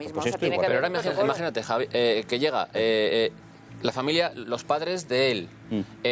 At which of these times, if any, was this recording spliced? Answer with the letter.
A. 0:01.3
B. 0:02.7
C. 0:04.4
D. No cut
B